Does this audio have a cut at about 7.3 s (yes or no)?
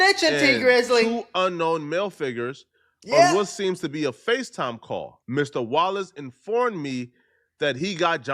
no